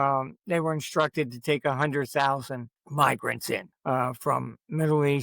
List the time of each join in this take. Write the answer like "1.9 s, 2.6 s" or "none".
2.8 s, 3.7 s